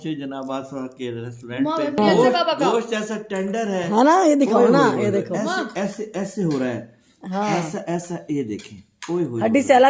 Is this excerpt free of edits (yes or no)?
no